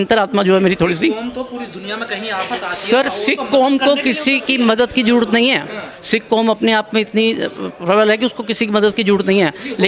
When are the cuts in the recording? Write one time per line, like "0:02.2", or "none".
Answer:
none